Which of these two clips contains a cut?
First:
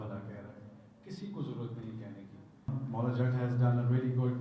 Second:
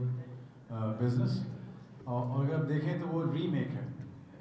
first; 1 cut; at 2.7 s

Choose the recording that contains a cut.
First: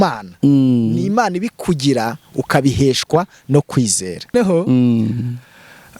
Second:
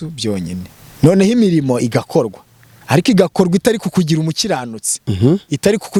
first; 1 cut; at 4.3 s

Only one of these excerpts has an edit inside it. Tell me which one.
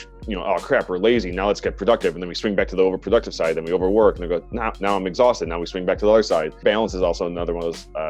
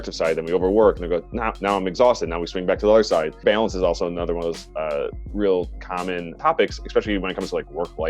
second; 1 cut; at 6.3 s

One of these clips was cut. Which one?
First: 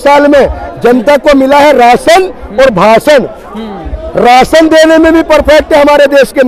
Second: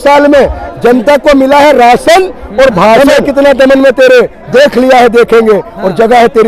second; 1 cut; at 3.0 s

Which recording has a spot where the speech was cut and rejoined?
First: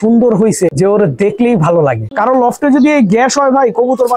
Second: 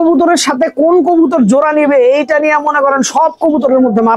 first; 1 cut; at 2.1 s

